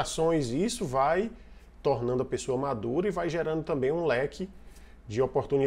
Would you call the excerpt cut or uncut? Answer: uncut